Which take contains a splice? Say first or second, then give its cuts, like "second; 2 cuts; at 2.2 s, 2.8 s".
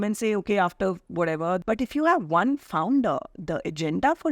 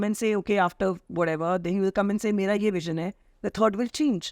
first; 1 cut; at 1.6 s